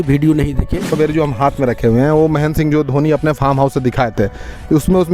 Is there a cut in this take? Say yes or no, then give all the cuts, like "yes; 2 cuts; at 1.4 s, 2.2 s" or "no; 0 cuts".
yes; 1 cut; at 0.9 s